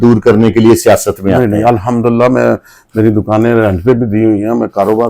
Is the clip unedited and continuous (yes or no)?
yes